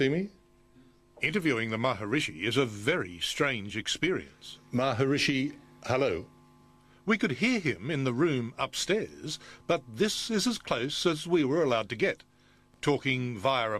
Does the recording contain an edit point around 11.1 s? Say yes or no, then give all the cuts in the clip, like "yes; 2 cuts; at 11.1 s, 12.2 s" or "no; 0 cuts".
no; 1 cut; at 3.2 s